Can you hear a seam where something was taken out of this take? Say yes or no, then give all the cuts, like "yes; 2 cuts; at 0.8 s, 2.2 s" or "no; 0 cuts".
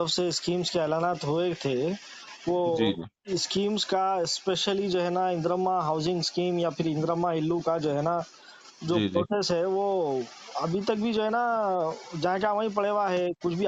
no; 0 cuts